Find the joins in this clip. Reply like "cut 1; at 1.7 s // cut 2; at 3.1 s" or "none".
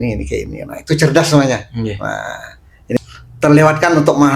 cut 1; at 3.0 s